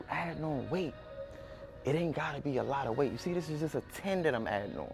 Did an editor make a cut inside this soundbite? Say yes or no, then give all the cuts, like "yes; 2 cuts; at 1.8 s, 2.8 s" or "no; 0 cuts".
no; 0 cuts